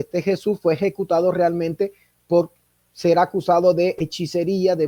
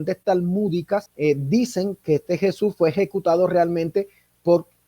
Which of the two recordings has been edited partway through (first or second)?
second